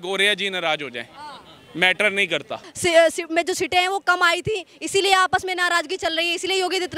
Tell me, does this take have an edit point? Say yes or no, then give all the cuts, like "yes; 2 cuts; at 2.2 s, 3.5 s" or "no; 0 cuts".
yes; 1 cut; at 2.6 s